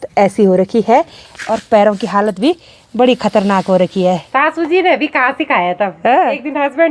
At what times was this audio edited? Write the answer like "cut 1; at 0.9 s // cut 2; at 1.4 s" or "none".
cut 1; at 4.2 s